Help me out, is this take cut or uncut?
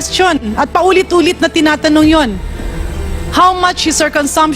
uncut